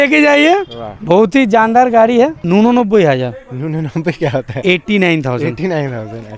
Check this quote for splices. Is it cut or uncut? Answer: cut